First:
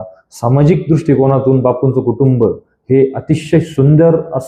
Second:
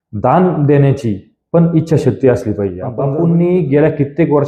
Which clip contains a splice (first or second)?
second